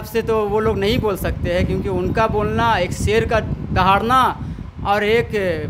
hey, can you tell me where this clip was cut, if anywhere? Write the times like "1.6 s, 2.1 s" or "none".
none